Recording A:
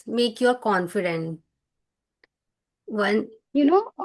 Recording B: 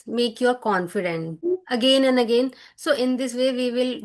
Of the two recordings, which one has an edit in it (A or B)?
B